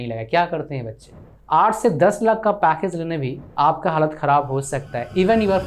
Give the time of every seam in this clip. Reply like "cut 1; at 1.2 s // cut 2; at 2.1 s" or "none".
cut 1; at 1.1 s